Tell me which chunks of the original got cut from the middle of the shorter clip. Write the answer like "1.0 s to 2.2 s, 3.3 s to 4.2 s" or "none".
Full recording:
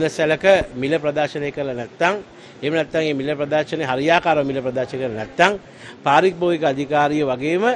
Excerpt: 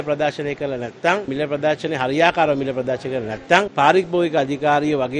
2.3 s to 3.2 s, 5.6 s to 6.0 s